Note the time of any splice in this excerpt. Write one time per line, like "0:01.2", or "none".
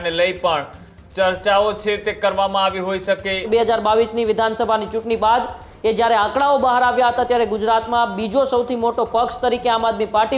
0:03.4